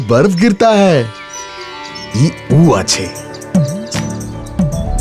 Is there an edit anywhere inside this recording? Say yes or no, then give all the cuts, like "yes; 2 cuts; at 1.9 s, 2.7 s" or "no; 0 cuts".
no; 0 cuts